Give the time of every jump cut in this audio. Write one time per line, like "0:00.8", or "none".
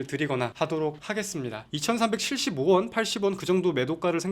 0:01.7